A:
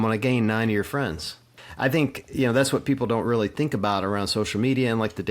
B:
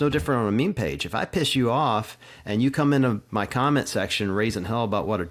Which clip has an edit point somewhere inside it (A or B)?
A